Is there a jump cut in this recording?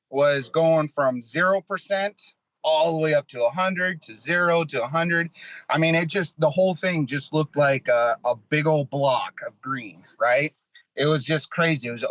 no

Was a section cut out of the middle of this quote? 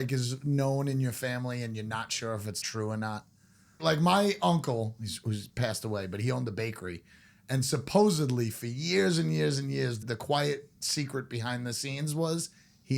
yes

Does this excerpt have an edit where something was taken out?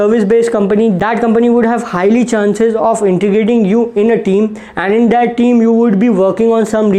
yes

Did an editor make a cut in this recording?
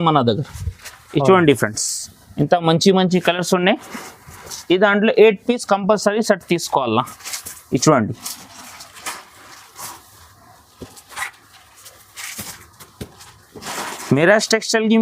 no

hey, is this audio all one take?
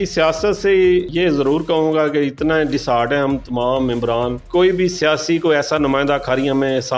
no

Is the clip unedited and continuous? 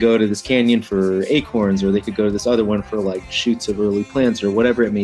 yes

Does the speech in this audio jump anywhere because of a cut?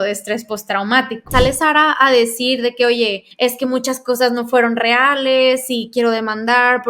yes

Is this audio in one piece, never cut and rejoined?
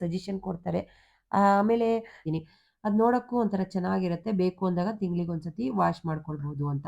no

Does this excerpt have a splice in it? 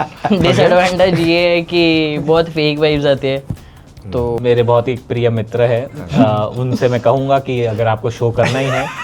yes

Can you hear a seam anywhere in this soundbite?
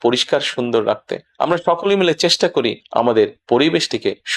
no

